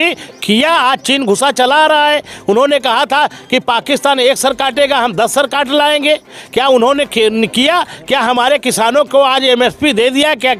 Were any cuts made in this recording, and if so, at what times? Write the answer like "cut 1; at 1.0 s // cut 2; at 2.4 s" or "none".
none